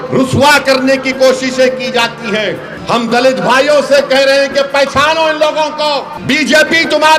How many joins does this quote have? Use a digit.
2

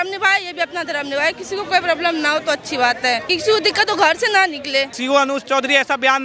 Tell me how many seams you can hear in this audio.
2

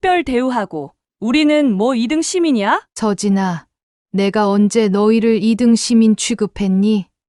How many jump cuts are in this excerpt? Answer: 1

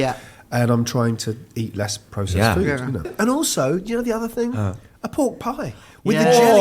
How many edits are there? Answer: 1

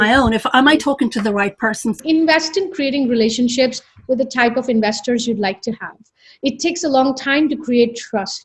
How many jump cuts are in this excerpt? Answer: 1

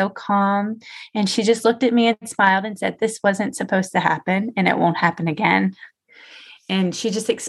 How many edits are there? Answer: 0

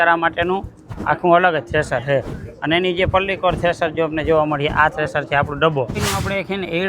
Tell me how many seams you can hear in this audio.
1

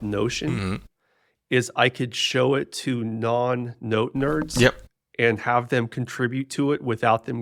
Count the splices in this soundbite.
0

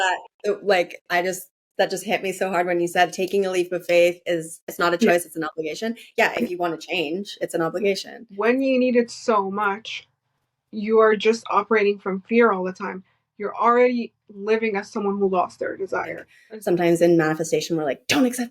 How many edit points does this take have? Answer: 3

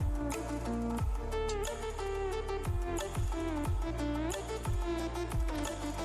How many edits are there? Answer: 0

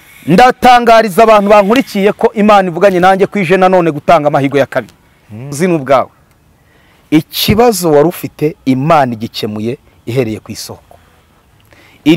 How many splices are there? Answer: 1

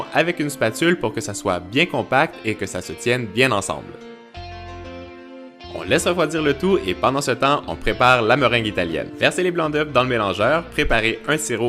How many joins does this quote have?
1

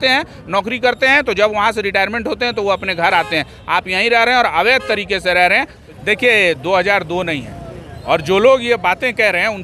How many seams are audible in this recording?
1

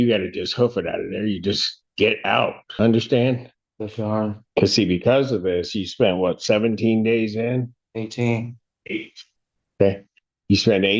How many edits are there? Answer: 2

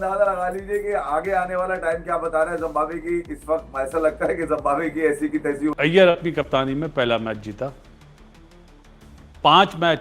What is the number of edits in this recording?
1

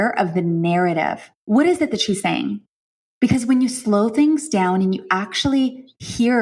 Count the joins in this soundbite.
1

